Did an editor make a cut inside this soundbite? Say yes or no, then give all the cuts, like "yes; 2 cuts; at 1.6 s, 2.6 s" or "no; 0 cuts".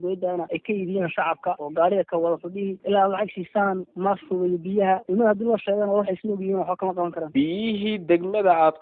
no; 0 cuts